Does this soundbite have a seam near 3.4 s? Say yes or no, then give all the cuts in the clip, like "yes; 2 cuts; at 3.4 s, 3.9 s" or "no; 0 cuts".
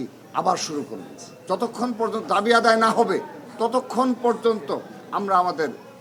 no; 0 cuts